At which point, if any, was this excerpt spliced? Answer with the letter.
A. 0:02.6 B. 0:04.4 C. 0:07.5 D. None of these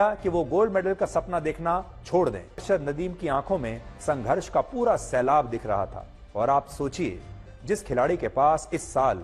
A